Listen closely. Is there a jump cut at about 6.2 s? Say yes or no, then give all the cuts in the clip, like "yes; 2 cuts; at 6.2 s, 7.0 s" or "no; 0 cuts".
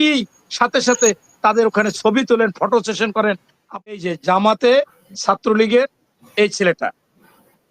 no; 1 cut; at 3.9 s